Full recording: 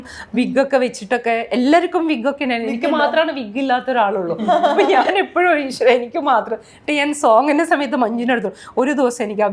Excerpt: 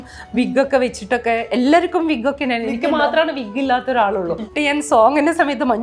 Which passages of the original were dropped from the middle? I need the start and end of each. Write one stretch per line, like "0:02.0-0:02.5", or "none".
0:04.4-0:06.7